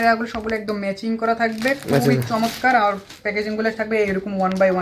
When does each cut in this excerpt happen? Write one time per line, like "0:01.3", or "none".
none